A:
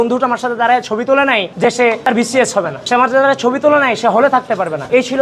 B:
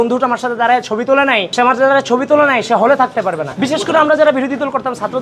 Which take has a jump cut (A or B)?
B